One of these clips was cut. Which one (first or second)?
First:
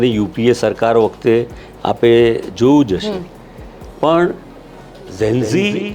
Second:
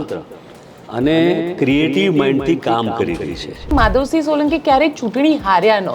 second